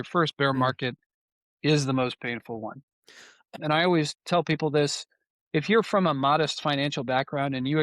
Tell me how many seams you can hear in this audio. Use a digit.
1